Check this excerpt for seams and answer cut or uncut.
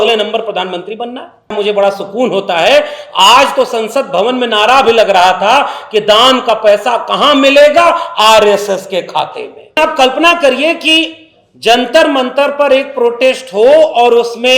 cut